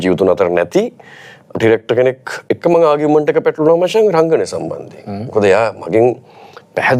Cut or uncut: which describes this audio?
cut